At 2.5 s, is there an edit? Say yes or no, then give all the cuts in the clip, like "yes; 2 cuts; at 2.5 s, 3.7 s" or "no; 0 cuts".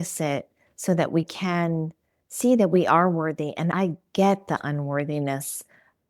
no; 1 cut; at 3.7 s